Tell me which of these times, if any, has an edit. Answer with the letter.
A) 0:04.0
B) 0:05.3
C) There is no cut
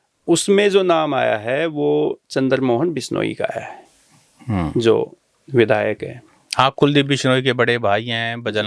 C